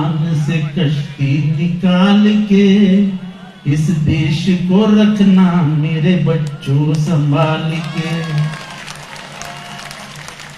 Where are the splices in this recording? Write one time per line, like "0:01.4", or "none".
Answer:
none